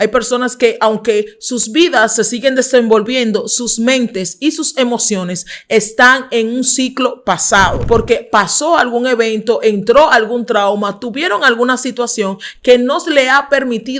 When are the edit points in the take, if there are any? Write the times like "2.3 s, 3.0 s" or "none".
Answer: 7.8 s